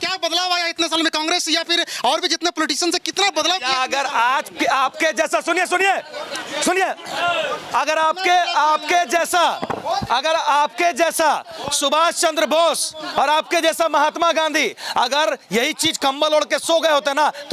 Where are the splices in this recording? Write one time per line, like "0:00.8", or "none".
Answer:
none